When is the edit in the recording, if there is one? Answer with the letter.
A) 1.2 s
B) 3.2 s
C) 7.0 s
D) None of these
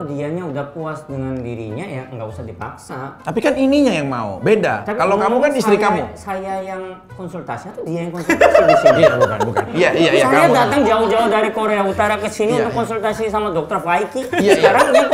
D